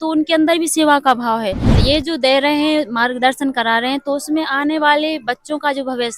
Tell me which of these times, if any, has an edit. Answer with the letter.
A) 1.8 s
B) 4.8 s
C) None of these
A